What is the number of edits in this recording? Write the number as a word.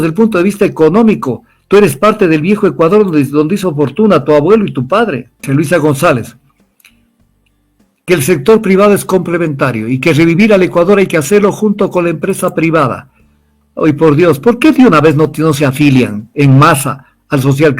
one